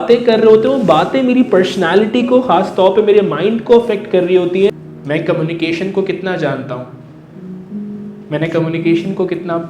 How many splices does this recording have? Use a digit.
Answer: 1